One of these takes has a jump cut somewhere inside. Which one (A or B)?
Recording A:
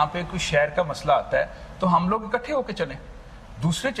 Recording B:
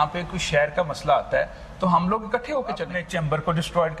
B